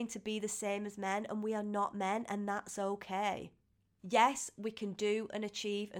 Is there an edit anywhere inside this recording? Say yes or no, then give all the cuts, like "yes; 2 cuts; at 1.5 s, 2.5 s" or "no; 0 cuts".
no; 0 cuts